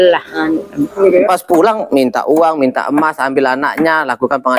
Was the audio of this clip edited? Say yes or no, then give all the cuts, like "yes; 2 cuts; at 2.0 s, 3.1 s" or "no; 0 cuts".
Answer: yes; 1 cut; at 0.9 s